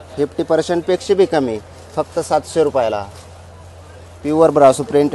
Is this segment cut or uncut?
uncut